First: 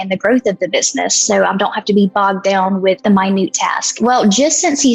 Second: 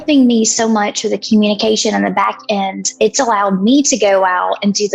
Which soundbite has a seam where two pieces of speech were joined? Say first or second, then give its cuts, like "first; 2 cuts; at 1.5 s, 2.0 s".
first; 2 cuts; at 3.0 s, 4.0 s